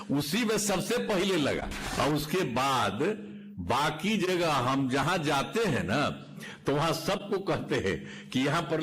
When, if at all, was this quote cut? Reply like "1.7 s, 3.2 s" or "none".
1.8 s